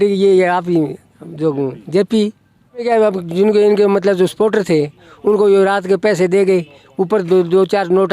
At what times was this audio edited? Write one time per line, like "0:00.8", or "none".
0:02.8